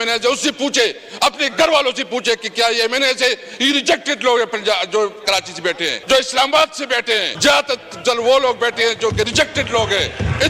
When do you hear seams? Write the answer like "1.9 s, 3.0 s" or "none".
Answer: 5.9 s, 7.3 s